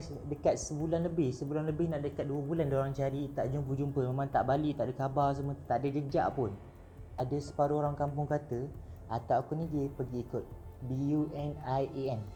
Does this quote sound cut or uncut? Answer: uncut